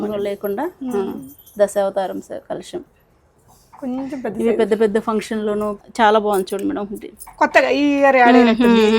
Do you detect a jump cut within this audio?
yes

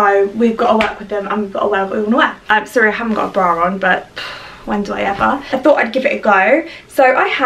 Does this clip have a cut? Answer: yes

